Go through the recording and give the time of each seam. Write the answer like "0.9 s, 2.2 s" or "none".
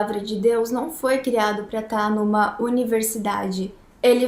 none